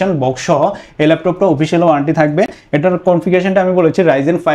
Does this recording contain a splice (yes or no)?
no